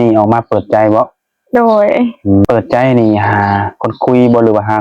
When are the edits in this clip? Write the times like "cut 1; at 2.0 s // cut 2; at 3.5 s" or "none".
cut 1; at 2.4 s